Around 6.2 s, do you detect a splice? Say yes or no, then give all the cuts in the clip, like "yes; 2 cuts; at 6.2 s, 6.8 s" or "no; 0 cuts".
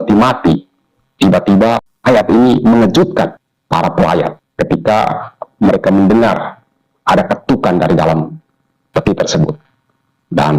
no; 3 cuts; at 1.9 s, 3.5 s, 4.4 s